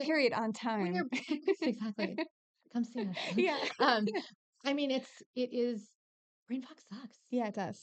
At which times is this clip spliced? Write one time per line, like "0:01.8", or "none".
none